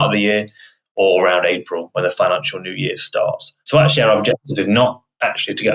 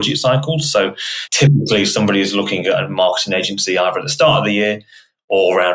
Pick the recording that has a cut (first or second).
second